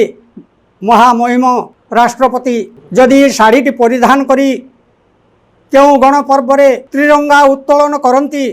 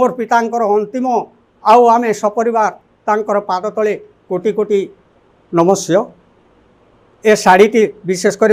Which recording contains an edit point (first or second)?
first